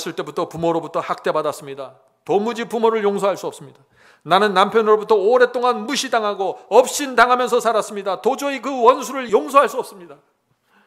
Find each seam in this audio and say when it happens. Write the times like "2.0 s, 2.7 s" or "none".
9.2 s